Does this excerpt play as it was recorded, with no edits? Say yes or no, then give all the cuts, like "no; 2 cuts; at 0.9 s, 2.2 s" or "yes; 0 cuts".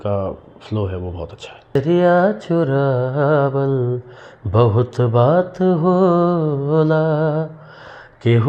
no; 1 cut; at 1.8 s